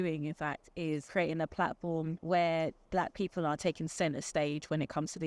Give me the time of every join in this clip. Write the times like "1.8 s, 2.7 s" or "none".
1.0 s, 2.2 s, 2.8 s